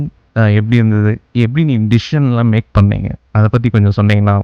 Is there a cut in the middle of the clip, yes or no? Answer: no